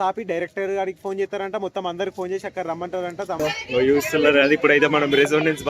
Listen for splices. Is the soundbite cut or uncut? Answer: cut